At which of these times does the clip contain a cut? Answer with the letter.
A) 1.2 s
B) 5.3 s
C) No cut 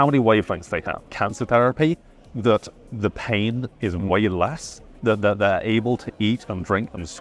A